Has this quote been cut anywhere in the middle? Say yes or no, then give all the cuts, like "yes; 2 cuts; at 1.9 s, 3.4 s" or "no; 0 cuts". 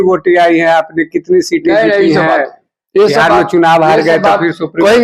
no; 0 cuts